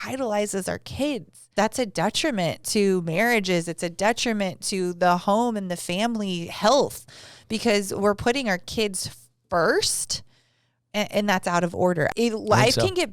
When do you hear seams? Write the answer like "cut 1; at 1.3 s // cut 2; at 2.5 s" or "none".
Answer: cut 1; at 1.5 s // cut 2; at 12.1 s